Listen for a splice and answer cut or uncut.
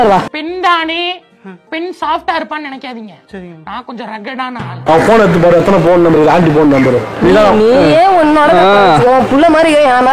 cut